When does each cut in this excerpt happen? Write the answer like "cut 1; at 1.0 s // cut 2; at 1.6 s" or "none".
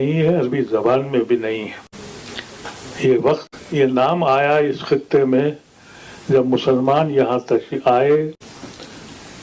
none